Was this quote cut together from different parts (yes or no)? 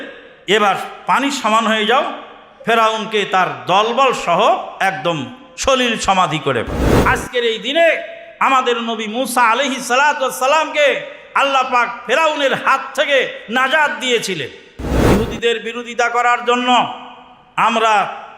yes